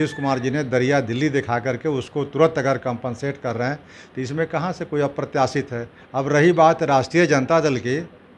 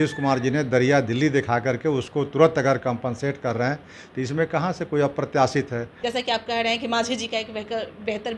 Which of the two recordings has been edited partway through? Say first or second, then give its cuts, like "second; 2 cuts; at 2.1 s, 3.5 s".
second; 1 cut; at 5.9 s